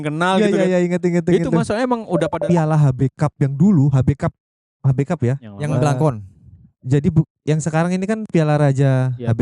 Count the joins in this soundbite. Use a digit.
1